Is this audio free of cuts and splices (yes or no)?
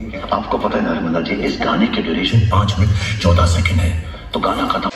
yes